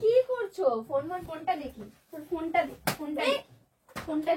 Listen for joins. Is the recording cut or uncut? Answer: cut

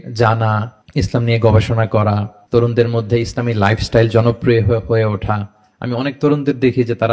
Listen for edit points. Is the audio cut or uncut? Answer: uncut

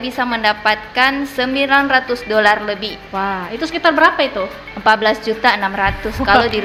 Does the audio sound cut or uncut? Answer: uncut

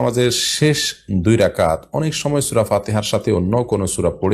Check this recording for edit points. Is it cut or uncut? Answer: uncut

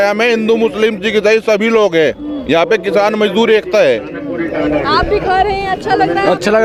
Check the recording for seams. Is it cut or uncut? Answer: uncut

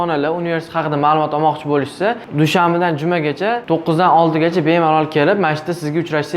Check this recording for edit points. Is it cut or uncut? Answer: cut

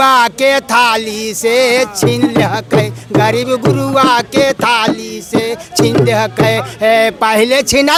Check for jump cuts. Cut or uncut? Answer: uncut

